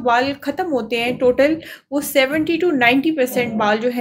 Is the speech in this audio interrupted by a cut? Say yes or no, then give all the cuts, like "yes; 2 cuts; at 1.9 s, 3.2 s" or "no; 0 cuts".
no; 0 cuts